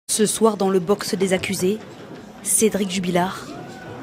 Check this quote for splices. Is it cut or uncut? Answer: uncut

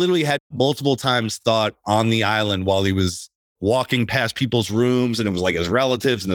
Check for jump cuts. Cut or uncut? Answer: uncut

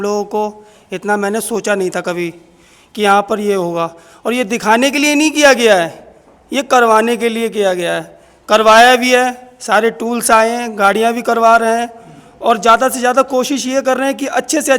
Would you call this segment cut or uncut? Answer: uncut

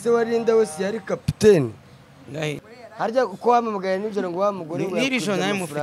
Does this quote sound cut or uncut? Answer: cut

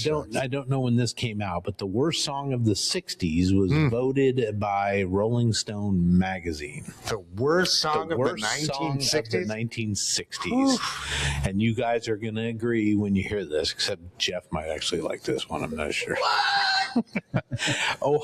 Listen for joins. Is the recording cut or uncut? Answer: uncut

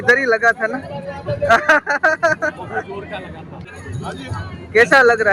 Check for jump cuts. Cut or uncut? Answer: cut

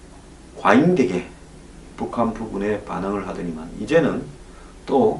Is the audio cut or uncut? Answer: cut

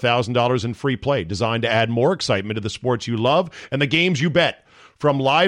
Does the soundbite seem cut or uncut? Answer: uncut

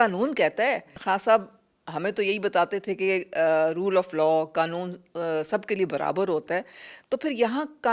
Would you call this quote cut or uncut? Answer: cut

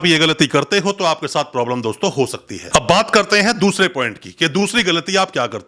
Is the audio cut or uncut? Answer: uncut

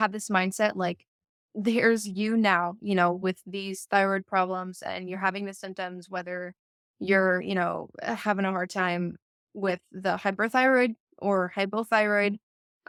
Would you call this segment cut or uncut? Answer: uncut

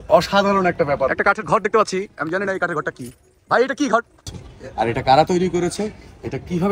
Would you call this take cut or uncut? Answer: cut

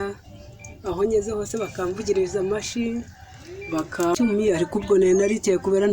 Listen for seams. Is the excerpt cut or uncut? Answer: cut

